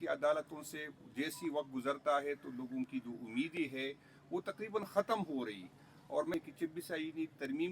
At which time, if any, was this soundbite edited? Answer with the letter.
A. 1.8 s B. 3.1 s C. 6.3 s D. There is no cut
C